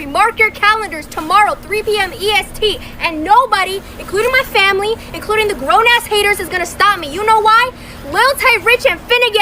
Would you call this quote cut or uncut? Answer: uncut